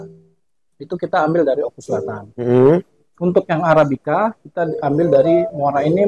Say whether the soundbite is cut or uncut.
uncut